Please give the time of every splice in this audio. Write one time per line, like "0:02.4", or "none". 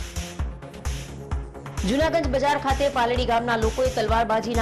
none